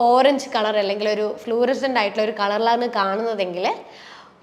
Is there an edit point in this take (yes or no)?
no